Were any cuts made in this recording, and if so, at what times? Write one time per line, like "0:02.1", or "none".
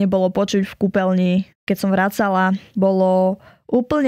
0:01.5
0:02.7